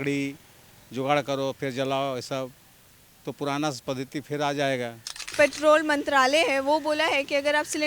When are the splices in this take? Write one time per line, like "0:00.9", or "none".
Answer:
0:05.3